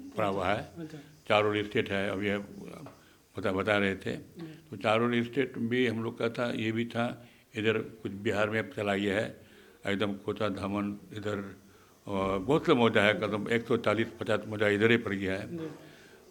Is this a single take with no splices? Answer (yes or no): yes